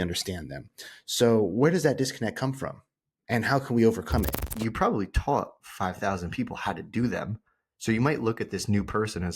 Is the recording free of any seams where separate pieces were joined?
no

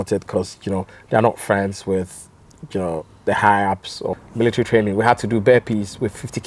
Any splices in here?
yes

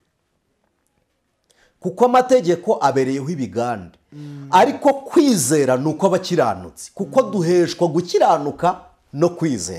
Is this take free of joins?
yes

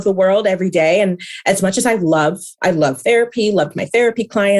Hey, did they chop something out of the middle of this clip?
no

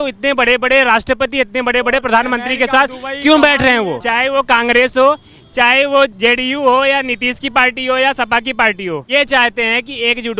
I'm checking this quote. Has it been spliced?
yes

